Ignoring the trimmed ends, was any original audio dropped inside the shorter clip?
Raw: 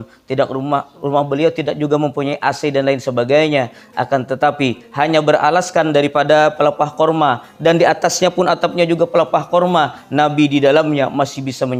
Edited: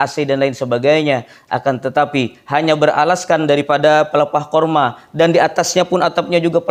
no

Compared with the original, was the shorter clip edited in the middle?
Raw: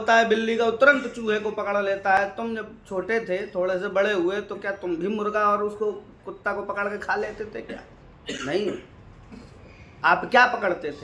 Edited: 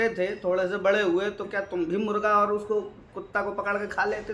no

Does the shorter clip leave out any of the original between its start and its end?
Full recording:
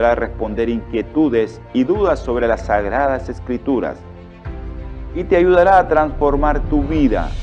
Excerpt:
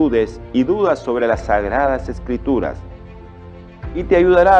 no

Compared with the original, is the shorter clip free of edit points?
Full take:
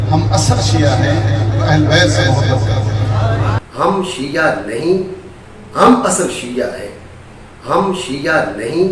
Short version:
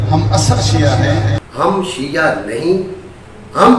no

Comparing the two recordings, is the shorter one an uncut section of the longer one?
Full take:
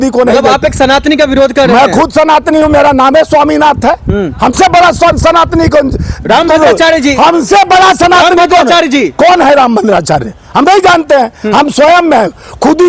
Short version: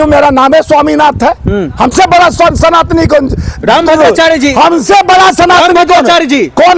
yes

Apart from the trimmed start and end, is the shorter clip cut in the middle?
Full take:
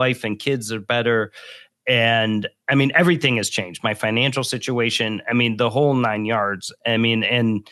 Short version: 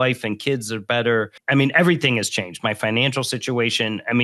yes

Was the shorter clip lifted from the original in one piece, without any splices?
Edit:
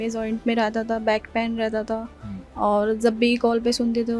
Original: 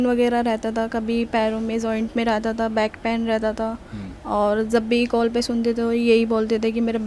yes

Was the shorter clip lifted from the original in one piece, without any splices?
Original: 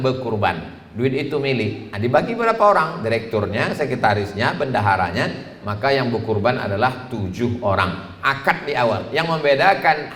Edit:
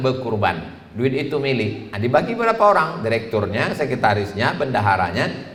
yes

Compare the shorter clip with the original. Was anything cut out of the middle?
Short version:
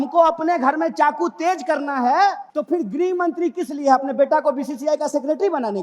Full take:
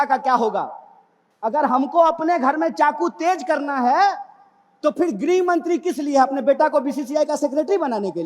yes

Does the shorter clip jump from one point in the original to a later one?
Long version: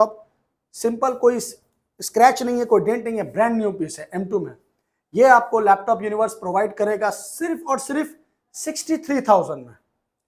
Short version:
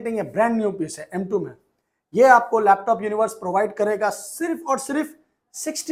no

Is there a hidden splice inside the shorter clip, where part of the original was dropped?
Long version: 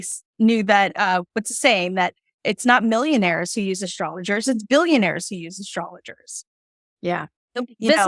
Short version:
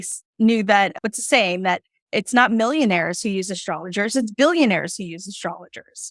yes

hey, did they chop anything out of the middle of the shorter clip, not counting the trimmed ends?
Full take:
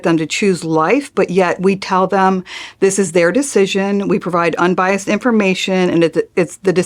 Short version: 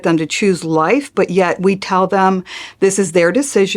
no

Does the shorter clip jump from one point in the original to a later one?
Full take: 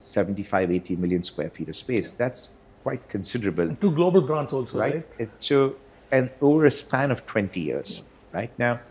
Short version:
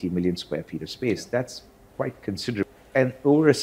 yes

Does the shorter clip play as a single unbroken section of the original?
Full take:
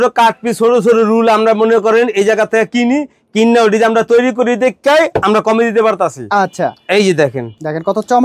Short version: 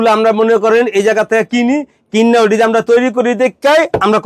yes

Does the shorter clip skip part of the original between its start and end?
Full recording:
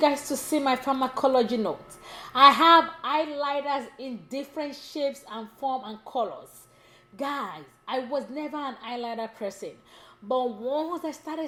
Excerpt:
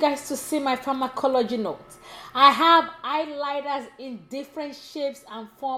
no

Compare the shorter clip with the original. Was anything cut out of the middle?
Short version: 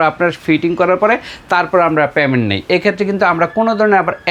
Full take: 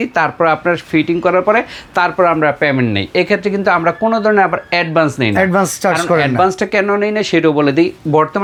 no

